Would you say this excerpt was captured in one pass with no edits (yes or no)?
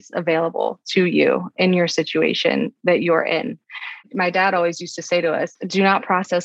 yes